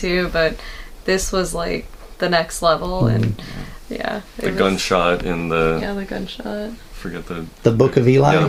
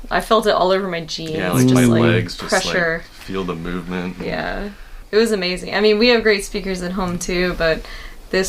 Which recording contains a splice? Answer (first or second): second